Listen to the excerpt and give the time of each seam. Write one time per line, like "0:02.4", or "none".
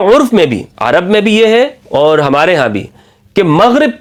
none